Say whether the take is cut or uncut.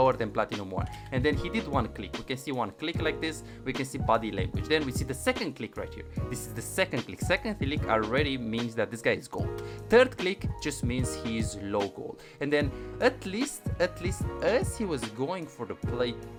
uncut